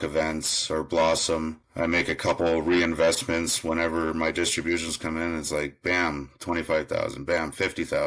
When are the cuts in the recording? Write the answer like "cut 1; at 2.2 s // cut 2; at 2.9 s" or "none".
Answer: none